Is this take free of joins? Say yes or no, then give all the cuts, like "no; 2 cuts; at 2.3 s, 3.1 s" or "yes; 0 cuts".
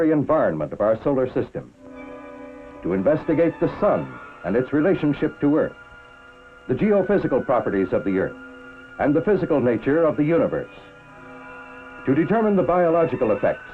yes; 0 cuts